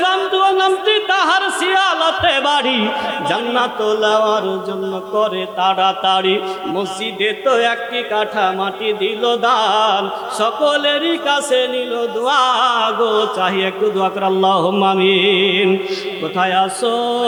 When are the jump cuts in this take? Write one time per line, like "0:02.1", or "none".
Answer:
none